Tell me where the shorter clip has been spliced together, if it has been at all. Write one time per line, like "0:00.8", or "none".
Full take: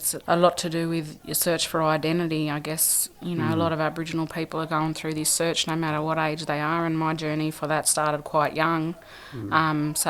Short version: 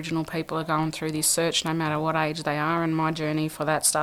none